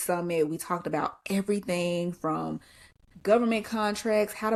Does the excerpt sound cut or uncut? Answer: uncut